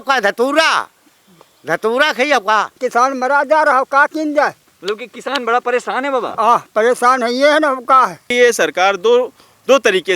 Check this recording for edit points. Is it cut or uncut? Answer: cut